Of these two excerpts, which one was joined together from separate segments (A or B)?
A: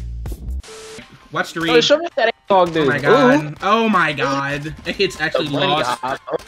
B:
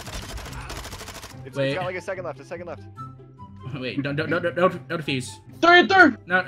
A